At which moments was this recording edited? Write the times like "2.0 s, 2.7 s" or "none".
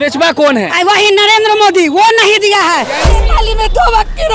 3.2 s